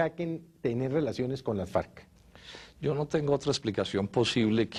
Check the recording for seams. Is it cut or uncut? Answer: uncut